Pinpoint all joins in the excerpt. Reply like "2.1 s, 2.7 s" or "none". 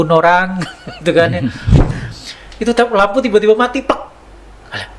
1.8 s